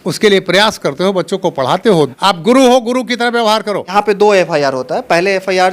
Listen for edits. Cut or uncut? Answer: cut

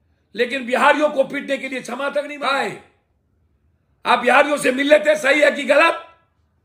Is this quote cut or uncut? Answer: cut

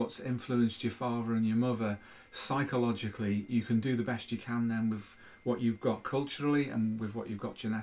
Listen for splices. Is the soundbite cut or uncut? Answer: uncut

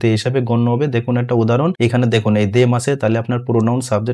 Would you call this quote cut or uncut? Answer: cut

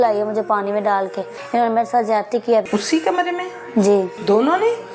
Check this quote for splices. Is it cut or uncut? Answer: cut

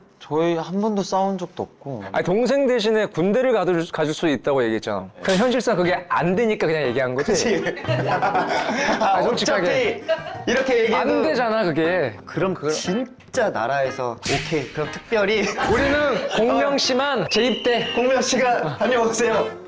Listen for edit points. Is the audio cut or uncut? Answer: cut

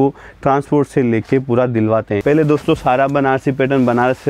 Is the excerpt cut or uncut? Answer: cut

